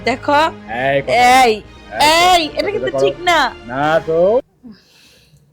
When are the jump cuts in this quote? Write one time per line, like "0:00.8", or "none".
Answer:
0:04.4